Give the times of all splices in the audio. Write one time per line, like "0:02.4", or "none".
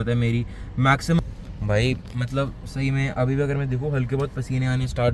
0:01.2